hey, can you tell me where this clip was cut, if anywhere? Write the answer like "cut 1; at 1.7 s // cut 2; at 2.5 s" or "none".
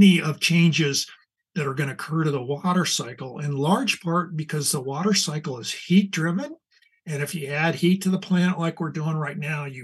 none

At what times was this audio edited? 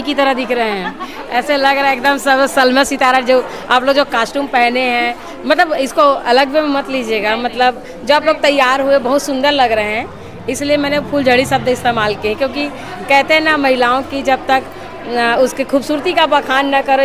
none

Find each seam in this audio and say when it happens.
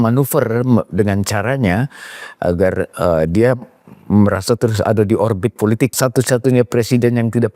cut 1; at 6.0 s

